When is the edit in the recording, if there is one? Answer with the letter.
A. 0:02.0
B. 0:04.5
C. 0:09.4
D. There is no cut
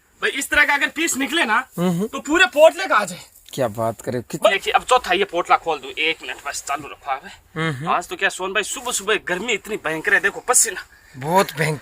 B